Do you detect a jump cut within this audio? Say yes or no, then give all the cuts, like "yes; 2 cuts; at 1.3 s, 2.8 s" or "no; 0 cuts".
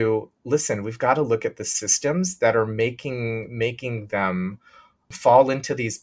no; 0 cuts